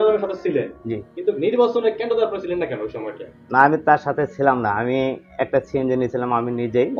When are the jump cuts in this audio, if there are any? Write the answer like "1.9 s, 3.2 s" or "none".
none